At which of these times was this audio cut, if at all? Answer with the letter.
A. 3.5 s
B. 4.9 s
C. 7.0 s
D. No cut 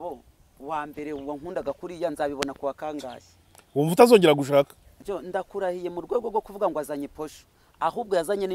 B